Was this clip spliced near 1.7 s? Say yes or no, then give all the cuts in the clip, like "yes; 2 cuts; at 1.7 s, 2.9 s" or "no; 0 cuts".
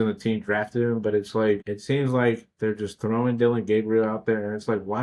yes; 1 cut; at 1.7 s